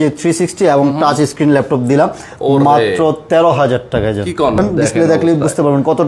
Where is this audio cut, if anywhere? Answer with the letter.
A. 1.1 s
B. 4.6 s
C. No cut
B